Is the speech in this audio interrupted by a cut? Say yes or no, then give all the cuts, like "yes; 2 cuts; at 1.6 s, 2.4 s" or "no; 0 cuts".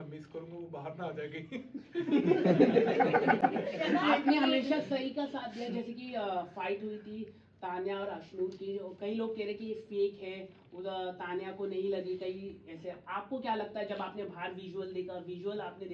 no; 0 cuts